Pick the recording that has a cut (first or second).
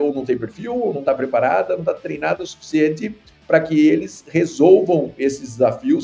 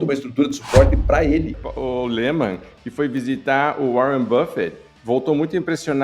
second